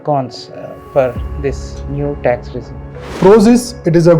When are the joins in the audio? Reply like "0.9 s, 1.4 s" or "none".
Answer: 3.1 s